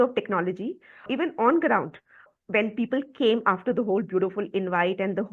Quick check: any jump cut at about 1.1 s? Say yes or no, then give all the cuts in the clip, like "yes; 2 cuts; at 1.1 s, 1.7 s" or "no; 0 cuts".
yes; 2 cuts; at 1.1 s, 2.3 s